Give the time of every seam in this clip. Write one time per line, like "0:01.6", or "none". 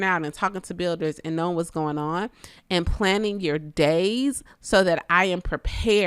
0:04.5